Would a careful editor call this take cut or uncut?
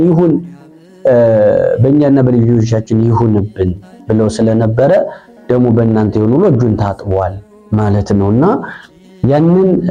uncut